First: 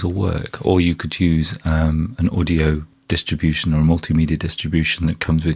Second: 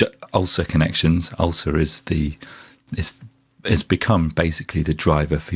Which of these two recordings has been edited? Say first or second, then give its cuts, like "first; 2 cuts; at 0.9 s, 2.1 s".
second; 1 cut; at 1.3 s